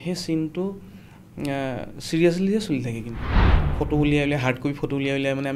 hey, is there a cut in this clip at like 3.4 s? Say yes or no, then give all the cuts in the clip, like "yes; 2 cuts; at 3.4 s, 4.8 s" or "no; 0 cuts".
yes; 1 cut; at 3.4 s